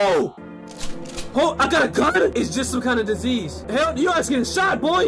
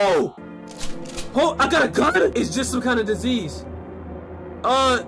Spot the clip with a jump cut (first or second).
first